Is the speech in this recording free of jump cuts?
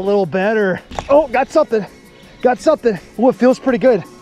no; 1 cut; at 0.9 s

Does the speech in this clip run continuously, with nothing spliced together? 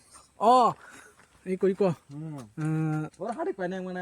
no; 1 cut; at 1.2 s

